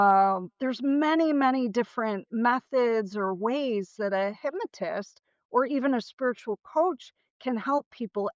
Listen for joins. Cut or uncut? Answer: uncut